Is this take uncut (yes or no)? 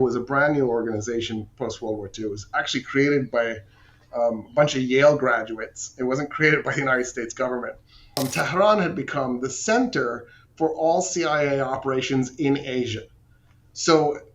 no